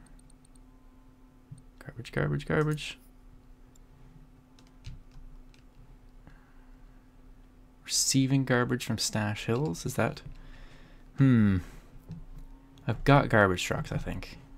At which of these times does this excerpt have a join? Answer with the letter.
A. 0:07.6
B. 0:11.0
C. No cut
C